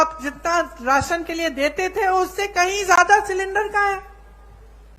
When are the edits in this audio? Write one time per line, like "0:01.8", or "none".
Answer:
none

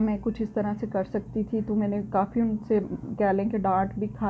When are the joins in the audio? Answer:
none

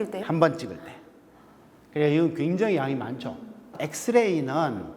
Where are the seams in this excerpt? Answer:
0:03.8

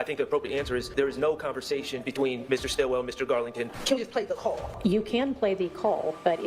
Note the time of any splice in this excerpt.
0:00.9
0:03.8
0:04.7

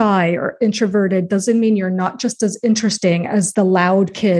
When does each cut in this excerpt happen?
0:03.5

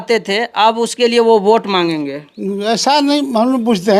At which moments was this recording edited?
none

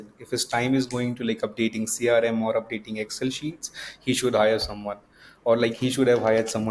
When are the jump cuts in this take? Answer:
none

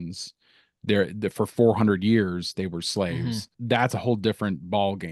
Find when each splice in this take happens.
0:03.5

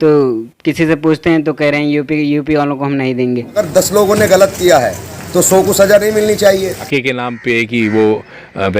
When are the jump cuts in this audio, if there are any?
0:03.6
0:06.9

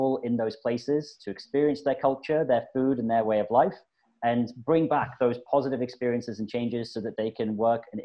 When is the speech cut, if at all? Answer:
none

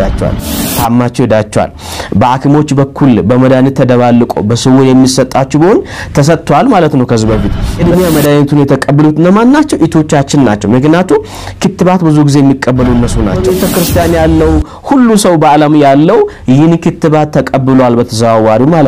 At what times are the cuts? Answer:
0:07.6
0:13.4

